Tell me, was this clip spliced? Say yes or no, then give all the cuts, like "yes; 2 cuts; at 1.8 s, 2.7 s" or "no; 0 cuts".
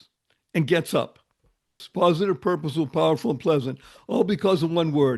yes; 1 cut; at 1.8 s